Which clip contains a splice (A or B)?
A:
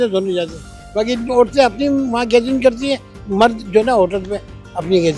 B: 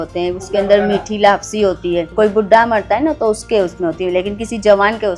B